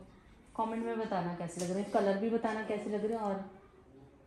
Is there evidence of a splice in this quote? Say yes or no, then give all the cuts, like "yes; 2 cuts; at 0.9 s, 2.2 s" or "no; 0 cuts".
no; 0 cuts